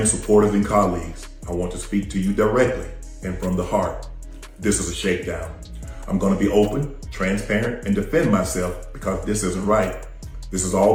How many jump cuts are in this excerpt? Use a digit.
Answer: 0